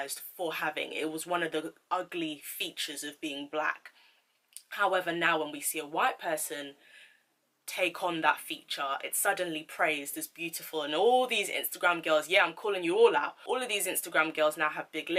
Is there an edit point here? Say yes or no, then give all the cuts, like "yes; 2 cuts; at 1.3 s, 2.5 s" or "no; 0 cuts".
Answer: no; 0 cuts